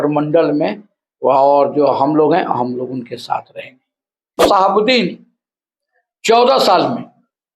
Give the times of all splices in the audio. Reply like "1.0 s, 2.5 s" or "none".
4.4 s